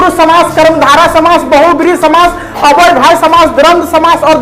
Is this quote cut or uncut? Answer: uncut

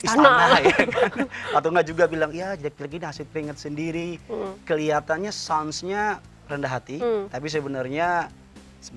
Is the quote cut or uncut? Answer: uncut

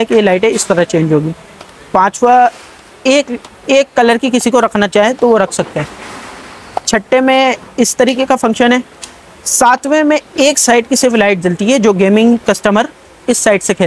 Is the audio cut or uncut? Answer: uncut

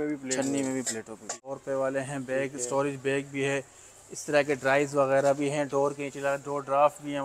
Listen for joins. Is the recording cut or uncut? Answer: cut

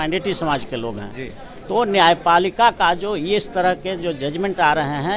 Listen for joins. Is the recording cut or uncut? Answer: uncut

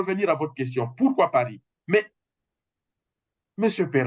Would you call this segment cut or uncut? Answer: uncut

